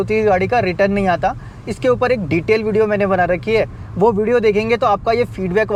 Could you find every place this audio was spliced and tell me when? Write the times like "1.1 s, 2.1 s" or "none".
none